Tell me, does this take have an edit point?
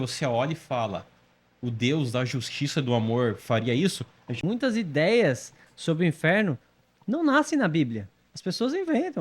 yes; 1 cut; at 4.4 s

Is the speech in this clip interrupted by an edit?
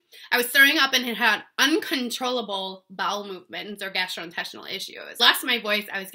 yes; 1 cut; at 5.2 s

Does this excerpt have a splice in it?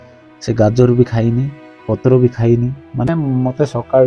yes; 1 cut; at 3.1 s

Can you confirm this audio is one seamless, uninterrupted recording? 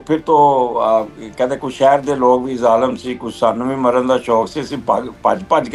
yes; 0 cuts

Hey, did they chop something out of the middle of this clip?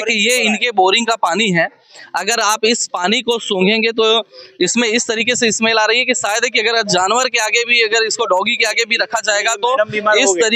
no; 0 cuts

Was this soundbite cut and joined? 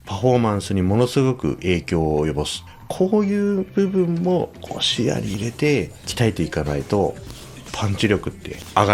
yes; 1 cut; at 6.0 s

